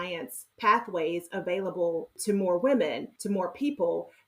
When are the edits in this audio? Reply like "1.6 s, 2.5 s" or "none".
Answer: 3.1 s